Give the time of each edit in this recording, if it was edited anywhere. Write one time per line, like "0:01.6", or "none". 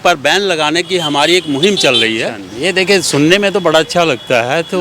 0:02.5